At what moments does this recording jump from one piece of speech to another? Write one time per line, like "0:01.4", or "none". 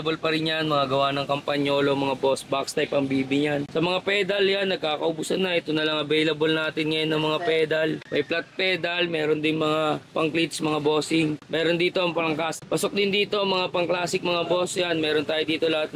none